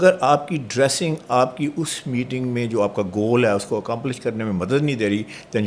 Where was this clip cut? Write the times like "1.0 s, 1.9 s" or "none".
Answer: none